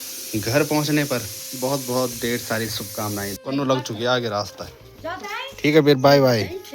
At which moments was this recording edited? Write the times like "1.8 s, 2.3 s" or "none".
1.4 s, 3.4 s